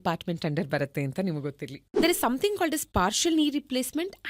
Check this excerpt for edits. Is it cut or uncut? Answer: cut